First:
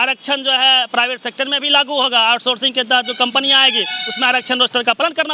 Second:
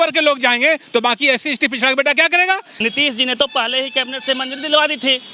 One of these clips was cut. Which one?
second; 1 cut; at 2.8 s

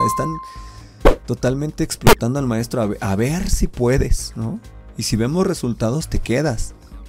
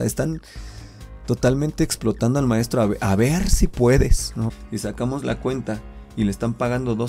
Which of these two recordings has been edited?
second; 1 cut; at 4.6 s

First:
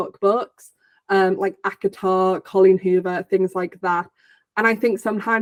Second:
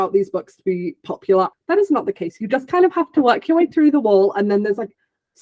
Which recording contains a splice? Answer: second; 1 cut; at 1.5 s

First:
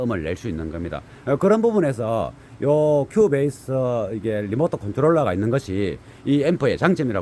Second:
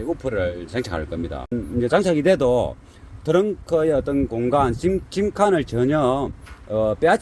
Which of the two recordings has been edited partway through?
second; 1 cut; at 1.5 s

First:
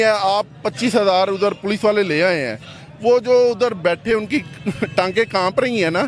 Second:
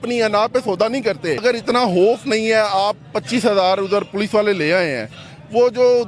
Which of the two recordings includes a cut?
second; 1 cut; at 1.4 s

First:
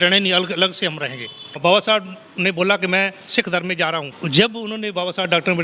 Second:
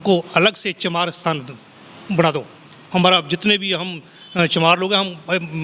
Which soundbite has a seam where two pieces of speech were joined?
first; 2 cuts; at 1.6 s, 4.2 s

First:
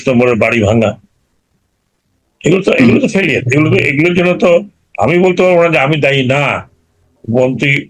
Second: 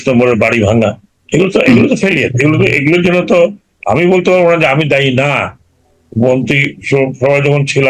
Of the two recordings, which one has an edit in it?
second; 1 cut; at 1.1 s

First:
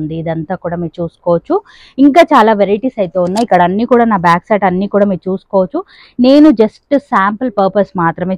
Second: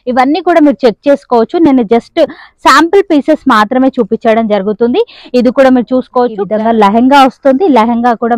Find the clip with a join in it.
second; 1 cut; at 6.4 s

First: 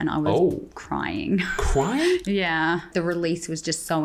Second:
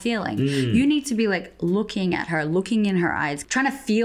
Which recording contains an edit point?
first; 1 cut; at 2.9 s

